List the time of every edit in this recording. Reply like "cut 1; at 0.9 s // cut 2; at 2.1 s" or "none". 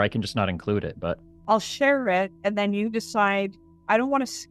cut 1; at 1.3 s